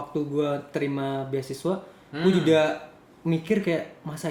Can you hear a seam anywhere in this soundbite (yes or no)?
no